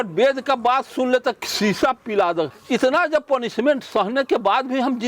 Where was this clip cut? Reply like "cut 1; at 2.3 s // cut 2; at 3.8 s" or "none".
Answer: cut 1; at 1.5 s // cut 2; at 2.6 s